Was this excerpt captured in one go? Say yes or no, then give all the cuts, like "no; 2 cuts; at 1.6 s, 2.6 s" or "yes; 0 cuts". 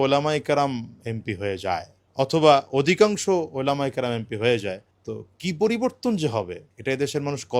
yes; 0 cuts